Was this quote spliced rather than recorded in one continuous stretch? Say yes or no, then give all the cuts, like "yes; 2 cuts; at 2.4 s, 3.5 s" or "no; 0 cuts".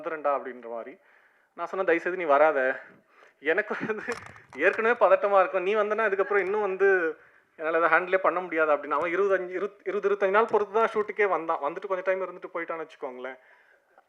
no; 0 cuts